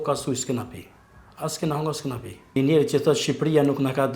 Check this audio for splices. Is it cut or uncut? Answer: cut